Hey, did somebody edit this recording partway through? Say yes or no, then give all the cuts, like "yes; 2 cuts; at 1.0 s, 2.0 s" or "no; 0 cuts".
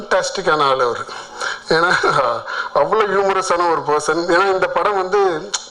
no; 0 cuts